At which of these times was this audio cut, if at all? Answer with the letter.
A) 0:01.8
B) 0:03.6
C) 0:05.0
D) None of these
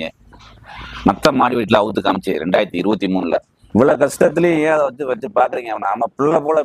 B